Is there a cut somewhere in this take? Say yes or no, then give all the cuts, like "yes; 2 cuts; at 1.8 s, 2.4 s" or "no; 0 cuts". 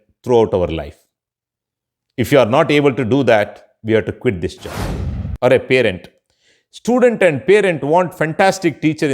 yes; 1 cut; at 5.2 s